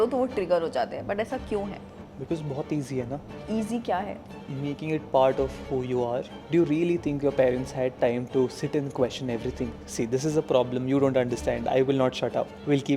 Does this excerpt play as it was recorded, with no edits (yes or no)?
no